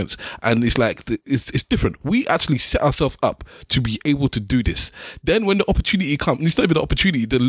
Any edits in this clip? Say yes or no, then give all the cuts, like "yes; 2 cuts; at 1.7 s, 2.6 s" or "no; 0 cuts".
no; 0 cuts